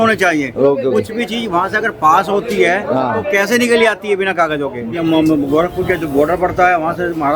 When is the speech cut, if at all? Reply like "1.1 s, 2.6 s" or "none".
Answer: 4.9 s

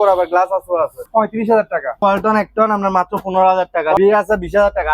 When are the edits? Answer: 1.0 s, 2.0 s, 4.0 s

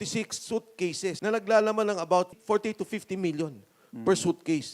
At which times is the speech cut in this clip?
1.2 s, 2.3 s

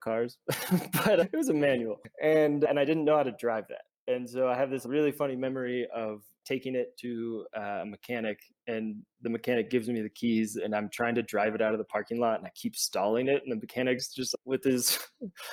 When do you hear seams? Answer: 2.7 s

